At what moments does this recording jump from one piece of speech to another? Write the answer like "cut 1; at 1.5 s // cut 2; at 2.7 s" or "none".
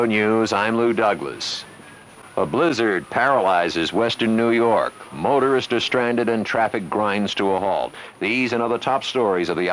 cut 1; at 8.0 s